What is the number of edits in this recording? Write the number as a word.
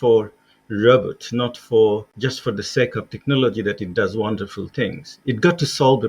one